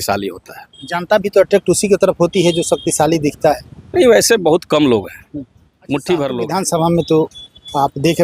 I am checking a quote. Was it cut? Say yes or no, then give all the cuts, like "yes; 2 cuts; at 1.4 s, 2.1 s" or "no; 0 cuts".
yes; 1 cut; at 6.5 s